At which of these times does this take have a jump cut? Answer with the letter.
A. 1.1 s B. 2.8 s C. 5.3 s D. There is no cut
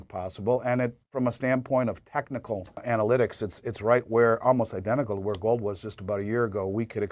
B